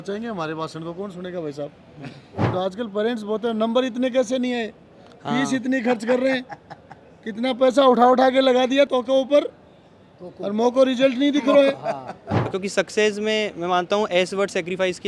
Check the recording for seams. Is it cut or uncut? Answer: cut